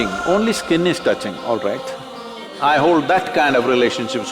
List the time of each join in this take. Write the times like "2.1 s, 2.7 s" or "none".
2.5 s